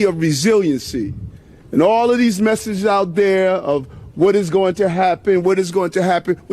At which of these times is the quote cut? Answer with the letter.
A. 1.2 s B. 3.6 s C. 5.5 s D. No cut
A